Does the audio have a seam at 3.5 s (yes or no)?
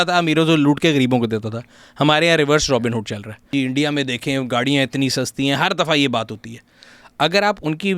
yes